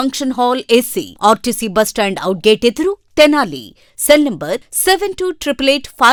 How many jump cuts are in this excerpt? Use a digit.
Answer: 0